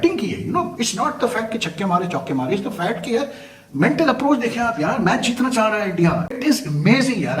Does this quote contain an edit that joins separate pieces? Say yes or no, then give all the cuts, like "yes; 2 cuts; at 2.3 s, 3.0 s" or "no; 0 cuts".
yes; 1 cut; at 6.4 s